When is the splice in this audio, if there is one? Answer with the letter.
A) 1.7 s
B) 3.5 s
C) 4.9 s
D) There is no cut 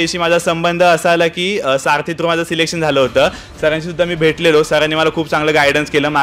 B